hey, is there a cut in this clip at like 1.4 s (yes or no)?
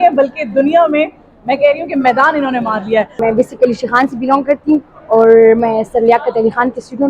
no